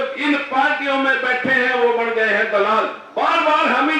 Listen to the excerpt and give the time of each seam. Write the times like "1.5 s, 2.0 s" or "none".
3.0 s